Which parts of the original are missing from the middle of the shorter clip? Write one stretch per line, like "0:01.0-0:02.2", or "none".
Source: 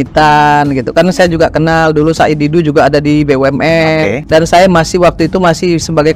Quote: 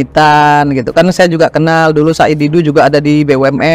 none